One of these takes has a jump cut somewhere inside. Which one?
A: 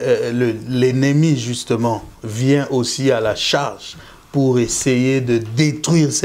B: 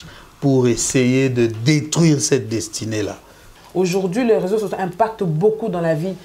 B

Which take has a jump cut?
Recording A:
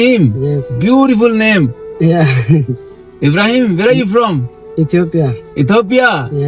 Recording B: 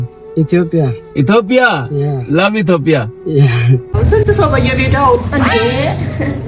B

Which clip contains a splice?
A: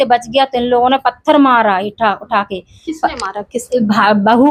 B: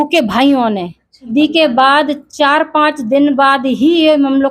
B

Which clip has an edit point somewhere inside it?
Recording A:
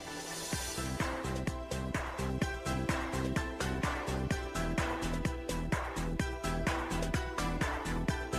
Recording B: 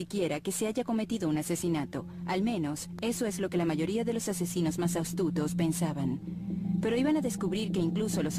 B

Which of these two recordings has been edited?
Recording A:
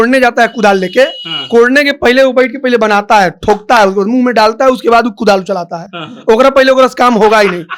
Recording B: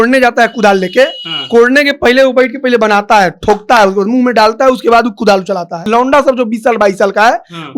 B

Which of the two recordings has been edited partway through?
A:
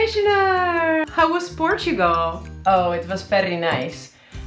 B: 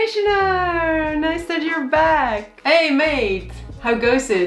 A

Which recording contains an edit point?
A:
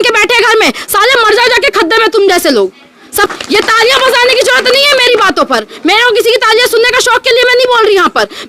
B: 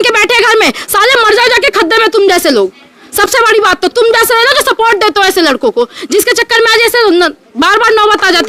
A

